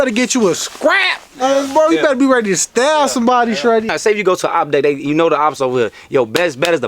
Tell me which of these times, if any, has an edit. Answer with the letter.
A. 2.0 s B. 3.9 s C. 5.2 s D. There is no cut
B